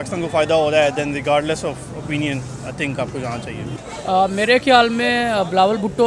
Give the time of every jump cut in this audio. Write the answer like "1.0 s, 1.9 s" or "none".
3.7 s